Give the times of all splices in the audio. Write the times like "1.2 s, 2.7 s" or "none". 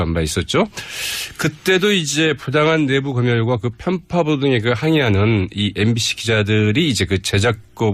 none

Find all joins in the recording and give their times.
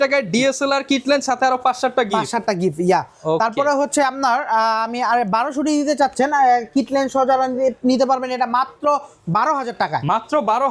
none

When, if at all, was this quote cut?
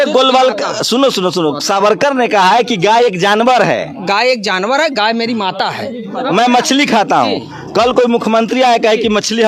6.1 s

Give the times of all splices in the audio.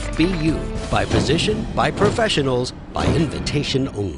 none

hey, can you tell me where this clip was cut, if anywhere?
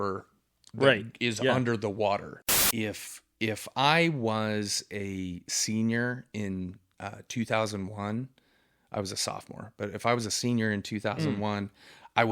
2.3 s

